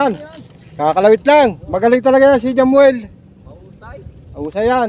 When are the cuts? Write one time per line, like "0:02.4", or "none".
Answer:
none

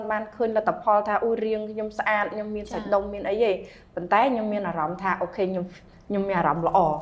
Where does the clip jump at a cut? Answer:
none

